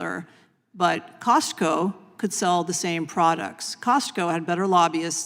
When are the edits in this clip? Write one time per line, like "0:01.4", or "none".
none